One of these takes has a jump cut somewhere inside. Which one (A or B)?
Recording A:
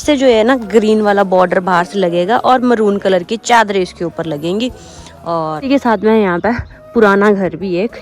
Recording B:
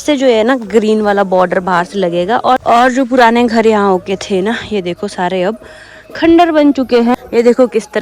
B